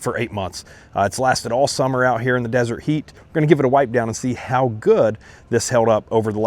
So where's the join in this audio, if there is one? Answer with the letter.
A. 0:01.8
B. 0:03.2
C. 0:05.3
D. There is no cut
B